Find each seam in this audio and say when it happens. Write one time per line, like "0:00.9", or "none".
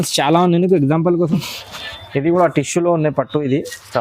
0:01.3